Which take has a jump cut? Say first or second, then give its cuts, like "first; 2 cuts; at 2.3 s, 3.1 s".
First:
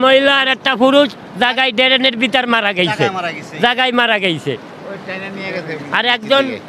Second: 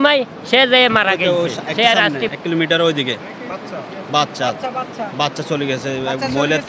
second; 1 cut; at 2.2 s